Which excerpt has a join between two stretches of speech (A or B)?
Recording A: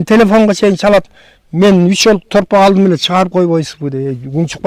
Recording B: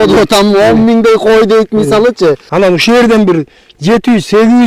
B